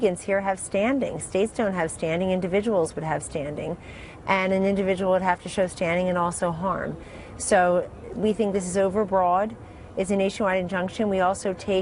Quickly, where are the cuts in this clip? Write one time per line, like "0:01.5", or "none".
0:10.3

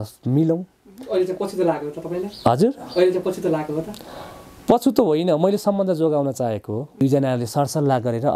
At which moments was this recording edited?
0:07.0

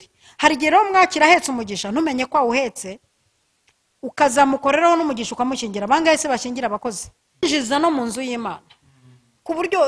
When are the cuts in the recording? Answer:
0:07.4

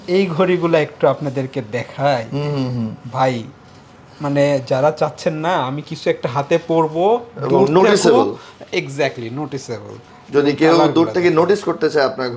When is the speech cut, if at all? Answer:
none

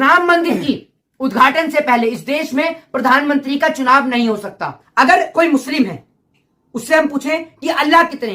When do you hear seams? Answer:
0:04.9

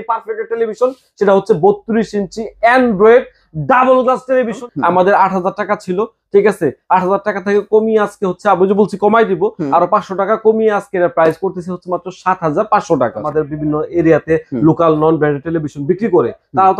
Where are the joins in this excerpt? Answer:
0:04.6
0:13.2

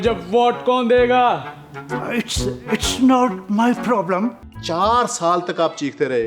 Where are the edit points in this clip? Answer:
0:04.4

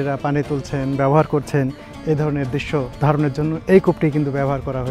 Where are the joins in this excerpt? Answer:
0:02.9

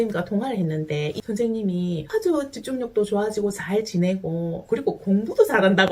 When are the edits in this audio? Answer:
0:01.2

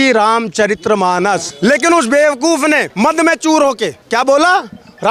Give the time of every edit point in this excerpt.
0:01.5
0:02.9
0:03.9

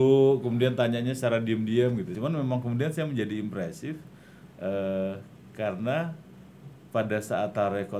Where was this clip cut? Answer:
0:02.1

